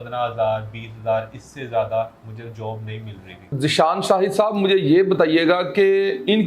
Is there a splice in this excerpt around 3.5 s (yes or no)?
yes